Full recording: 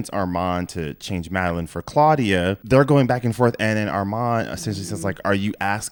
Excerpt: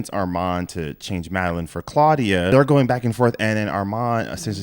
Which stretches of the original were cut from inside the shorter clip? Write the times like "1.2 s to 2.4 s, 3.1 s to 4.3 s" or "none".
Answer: 2.5 s to 2.7 s